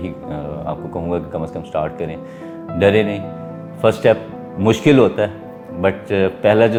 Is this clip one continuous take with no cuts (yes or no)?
yes